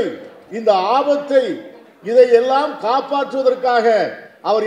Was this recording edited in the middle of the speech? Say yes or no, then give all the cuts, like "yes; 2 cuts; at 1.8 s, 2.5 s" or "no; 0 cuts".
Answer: no; 0 cuts